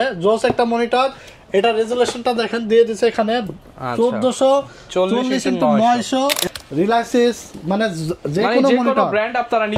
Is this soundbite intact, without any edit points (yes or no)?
no